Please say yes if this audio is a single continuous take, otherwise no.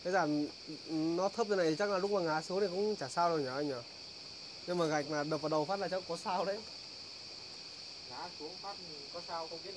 yes